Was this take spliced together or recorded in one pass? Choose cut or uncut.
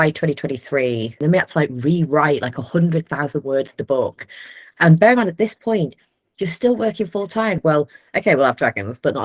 cut